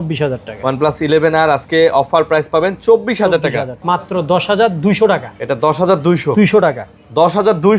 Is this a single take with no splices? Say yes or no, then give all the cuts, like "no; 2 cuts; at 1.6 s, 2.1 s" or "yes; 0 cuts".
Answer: no; 1 cut; at 3.7 s